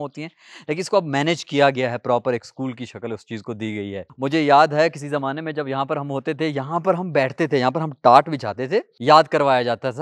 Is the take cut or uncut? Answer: cut